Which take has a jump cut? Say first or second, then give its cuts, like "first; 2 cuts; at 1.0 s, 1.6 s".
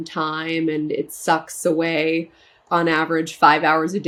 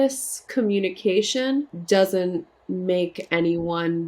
second; 2 cuts; at 1.8 s, 2.6 s